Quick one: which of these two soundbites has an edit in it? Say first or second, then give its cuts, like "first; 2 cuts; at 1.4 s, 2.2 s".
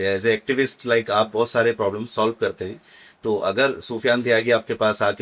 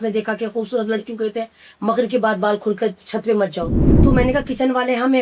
second; 1 cut; at 3.8 s